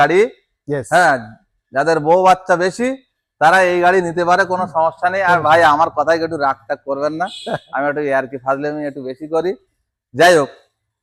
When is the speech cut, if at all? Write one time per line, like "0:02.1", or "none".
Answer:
none